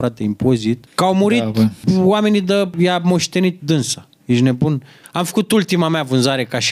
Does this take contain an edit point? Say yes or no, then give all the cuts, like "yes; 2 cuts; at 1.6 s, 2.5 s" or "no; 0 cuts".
yes; 5 cuts; at 0.9 s, 1.8 s, 2.7 s, 3.6 s, 4.9 s